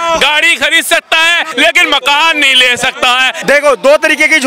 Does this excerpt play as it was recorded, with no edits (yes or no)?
no